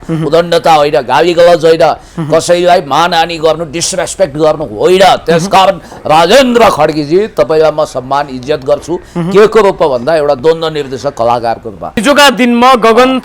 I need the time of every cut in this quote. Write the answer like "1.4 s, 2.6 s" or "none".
12.0 s